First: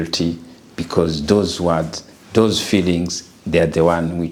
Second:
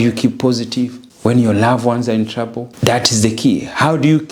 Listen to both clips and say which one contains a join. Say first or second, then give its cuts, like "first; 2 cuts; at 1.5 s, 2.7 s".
second; 2 cuts; at 1.0 s, 2.6 s